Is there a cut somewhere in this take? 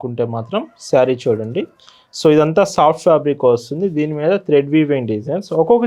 no; 0 cuts

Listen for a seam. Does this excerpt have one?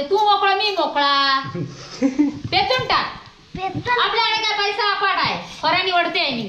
no; 0 cuts

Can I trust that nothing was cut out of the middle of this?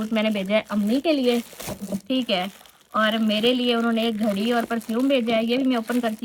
yes; 0 cuts

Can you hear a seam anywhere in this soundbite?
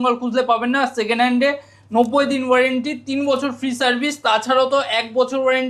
no; 0 cuts

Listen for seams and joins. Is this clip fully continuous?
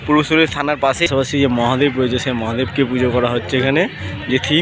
no; 1 cut; at 1.1 s

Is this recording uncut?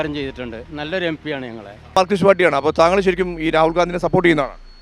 no; 1 cut; at 2.0 s

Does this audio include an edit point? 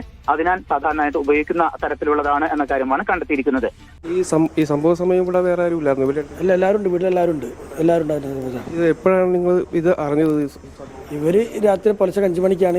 yes; 1 cut; at 3.8 s

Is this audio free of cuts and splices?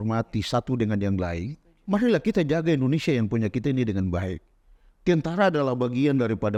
yes; 0 cuts

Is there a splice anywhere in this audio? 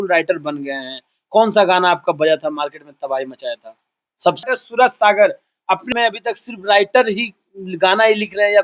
yes; 2 cuts; at 4.4 s, 5.9 s

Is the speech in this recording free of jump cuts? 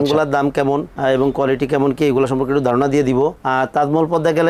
yes; 0 cuts

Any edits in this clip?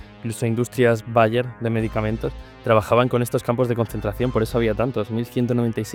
no; 0 cuts

